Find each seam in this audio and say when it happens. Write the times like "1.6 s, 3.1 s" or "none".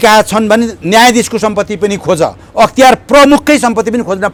none